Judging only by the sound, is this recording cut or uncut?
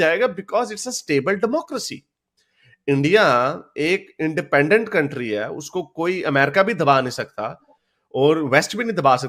uncut